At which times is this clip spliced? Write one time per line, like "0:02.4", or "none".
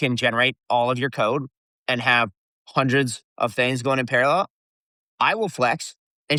none